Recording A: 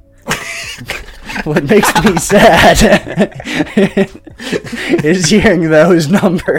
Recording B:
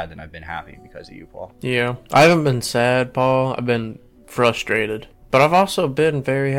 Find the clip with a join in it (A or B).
B